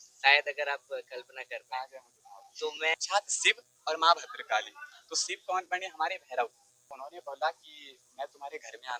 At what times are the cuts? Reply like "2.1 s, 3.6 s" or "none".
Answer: 2.9 s, 6.7 s